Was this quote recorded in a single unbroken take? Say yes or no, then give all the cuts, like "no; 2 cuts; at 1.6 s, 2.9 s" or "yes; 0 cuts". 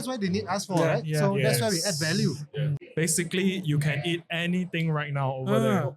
no; 1 cut; at 2.8 s